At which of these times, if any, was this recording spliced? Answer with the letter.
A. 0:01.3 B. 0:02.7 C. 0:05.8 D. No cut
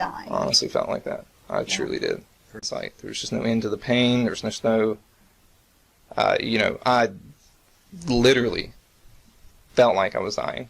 B